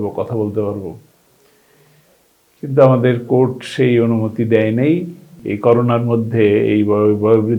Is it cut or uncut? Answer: cut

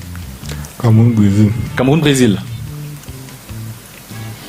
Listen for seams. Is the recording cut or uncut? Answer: uncut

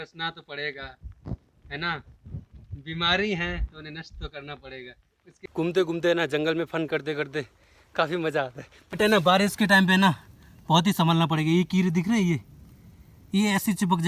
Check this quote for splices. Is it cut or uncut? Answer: cut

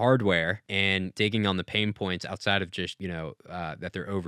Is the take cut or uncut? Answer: cut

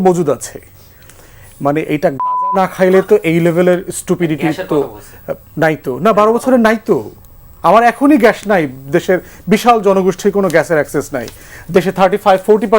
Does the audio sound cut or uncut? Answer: uncut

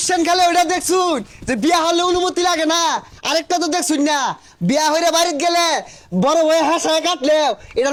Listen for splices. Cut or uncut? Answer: uncut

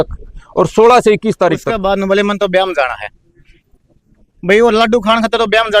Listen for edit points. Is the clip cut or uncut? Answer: cut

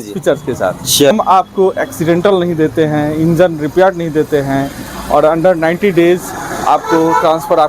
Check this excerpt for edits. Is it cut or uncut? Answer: cut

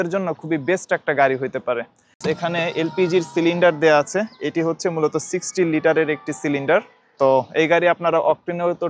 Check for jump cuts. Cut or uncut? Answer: cut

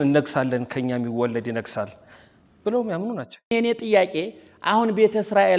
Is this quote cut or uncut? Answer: cut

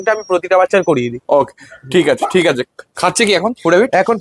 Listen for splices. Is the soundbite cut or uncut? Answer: uncut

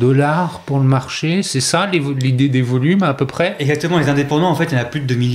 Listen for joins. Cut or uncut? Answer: uncut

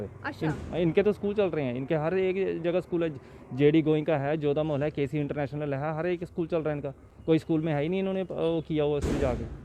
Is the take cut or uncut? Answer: uncut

